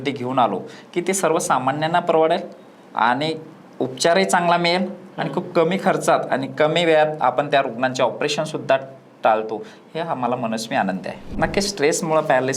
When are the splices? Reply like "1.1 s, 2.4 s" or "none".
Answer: 11.3 s